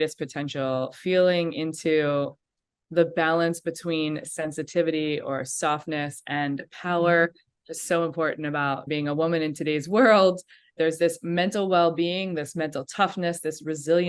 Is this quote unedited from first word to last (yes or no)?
no